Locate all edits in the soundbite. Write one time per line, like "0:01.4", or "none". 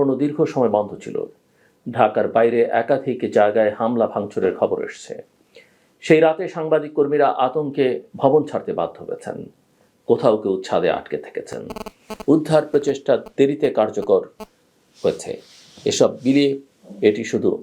none